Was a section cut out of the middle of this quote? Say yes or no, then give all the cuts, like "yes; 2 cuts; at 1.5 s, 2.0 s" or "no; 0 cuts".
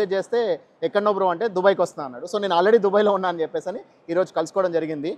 no; 0 cuts